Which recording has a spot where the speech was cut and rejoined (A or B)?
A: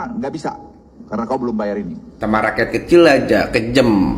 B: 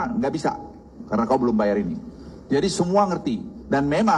A